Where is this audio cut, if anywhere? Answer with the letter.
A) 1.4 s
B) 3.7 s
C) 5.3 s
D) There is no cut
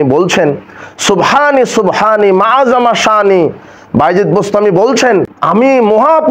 C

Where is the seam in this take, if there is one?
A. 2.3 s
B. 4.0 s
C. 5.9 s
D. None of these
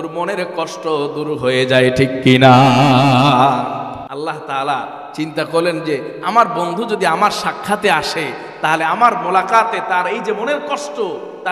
B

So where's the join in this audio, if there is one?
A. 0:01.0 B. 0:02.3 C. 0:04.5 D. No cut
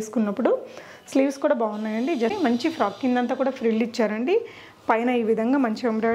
B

